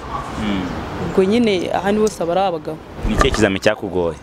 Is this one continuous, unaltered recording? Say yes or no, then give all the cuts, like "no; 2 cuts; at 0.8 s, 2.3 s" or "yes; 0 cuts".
no; 1 cut; at 2.9 s